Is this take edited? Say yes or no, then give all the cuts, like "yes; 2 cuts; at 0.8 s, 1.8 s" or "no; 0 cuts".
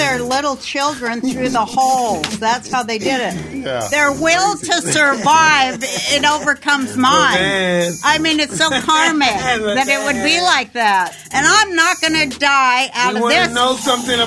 yes; 1 cut; at 11.2 s